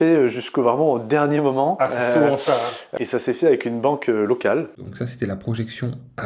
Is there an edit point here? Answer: yes; 2 cuts; at 2.8 s, 4.9 s

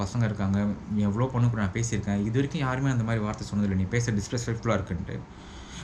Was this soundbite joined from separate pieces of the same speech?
no; 0 cuts

